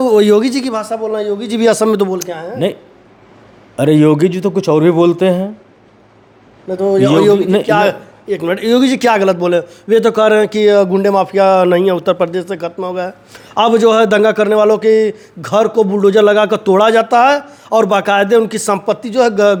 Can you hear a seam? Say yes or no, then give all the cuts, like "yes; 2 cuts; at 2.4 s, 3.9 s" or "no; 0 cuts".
no; 0 cuts